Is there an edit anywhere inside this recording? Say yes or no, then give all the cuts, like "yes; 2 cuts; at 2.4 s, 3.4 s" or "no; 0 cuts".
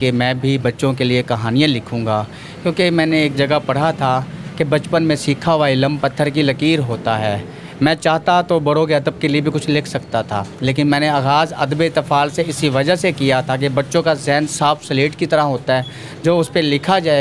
no; 0 cuts